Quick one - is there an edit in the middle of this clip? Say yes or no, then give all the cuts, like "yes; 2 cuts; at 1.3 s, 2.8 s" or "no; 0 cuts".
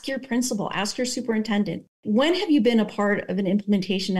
yes; 1 cut; at 1.9 s